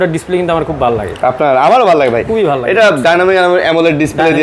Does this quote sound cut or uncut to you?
uncut